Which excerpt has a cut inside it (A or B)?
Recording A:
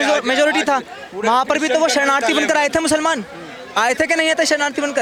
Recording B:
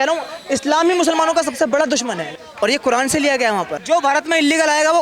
B